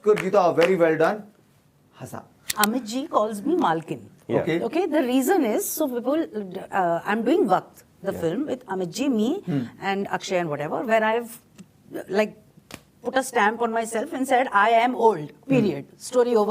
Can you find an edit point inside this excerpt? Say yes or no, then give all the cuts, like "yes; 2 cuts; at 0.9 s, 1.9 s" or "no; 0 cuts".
yes; 1 cut; at 2.5 s